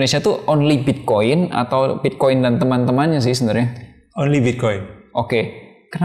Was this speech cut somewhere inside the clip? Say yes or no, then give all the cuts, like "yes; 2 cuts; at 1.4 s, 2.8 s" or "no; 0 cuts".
no; 0 cuts